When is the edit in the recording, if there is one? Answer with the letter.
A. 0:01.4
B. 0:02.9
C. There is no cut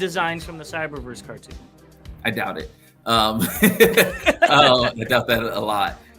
C